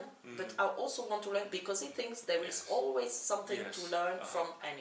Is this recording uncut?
yes; 0 cuts

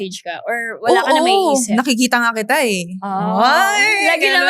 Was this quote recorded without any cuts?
yes; 0 cuts

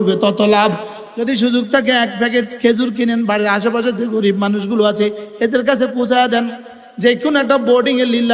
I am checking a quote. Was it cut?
yes; 1 cut; at 0.9 s

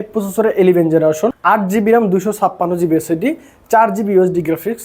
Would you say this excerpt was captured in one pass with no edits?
no; 1 cut; at 1.4 s

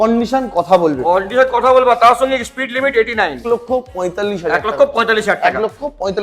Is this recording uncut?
no; 1 cut; at 3.4 s

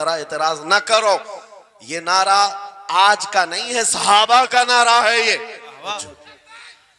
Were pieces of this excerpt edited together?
yes; 1 cut; at 5.9 s

